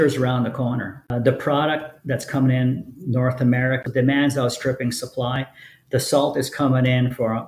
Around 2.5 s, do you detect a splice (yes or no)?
no